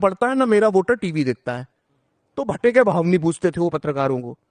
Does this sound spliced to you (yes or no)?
no